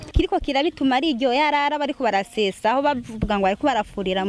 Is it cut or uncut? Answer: uncut